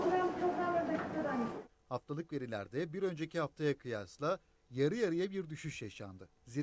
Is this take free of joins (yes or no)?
no